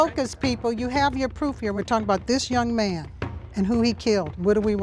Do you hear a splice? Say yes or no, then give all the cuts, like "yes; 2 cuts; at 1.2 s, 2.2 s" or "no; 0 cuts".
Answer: yes; 1 cut; at 1.8 s